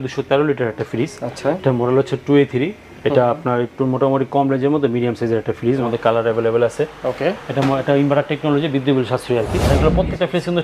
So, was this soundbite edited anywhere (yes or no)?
yes